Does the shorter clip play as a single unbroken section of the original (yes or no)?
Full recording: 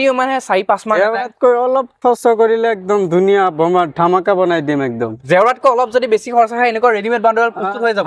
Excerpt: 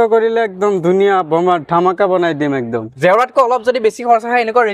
yes